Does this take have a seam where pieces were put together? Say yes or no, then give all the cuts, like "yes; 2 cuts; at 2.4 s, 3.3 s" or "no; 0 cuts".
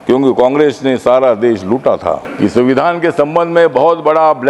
yes; 1 cut; at 2.3 s